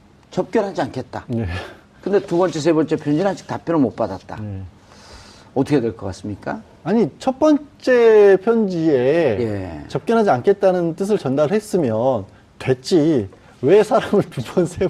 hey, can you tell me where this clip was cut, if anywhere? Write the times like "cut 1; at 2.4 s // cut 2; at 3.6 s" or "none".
none